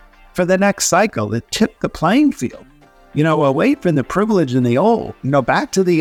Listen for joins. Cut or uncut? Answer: uncut